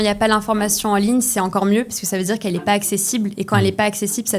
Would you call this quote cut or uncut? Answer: uncut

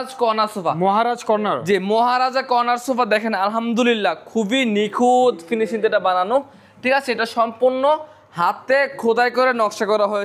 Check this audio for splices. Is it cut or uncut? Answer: uncut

